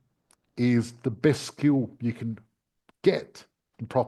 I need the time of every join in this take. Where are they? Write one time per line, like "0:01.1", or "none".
none